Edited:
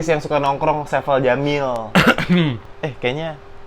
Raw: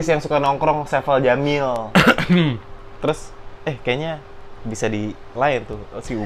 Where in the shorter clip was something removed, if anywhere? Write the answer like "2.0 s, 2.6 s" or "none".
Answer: 2.7 s